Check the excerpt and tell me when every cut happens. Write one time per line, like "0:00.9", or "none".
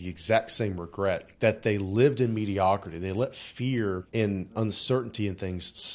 0:01.3
0:04.5